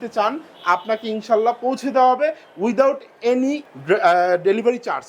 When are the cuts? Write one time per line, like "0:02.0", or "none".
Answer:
0:03.7